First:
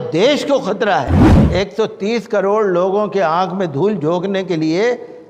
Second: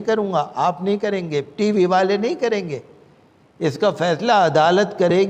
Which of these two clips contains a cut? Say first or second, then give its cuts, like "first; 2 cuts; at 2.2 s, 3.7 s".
first; 1 cut; at 1.3 s